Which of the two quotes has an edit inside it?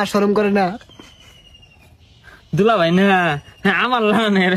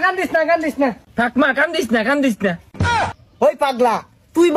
second; 2 cuts; at 1.0 s, 3.2 s

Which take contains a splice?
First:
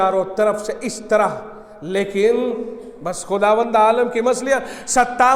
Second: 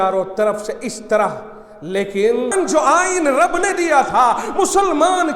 second; 1 cut; at 2.5 s

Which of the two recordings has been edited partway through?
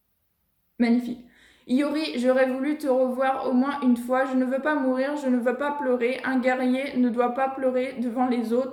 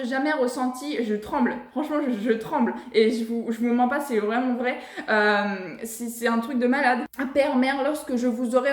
second; 1 cut; at 7.1 s

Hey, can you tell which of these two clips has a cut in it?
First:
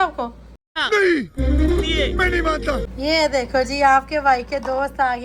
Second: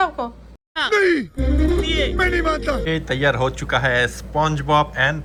first; 1 cut; at 2.8 s

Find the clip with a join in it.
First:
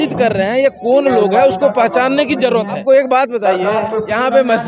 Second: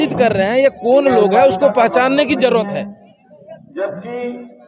first; 1 cut; at 2.8 s

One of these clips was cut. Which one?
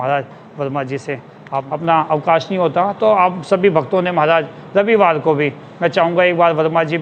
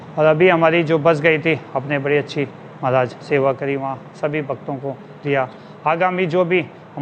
first; 1 cut; at 1.7 s

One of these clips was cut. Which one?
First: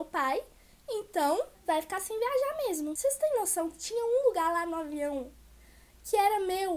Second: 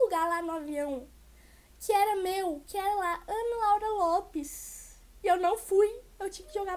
first; 2 cuts; at 1.6 s, 2.9 s

